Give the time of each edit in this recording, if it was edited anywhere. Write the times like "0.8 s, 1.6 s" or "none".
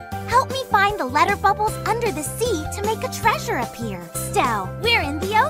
4.2 s